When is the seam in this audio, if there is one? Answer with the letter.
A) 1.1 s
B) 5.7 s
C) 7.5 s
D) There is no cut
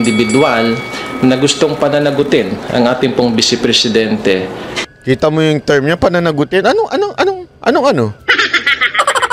C